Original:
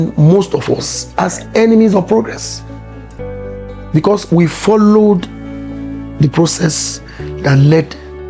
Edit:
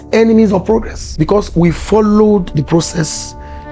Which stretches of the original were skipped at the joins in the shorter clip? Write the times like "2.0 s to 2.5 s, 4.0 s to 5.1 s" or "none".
2.4 s to 3.8 s, 5.2 s to 6.1 s